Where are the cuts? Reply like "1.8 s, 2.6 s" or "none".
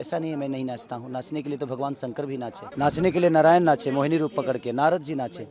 2.6 s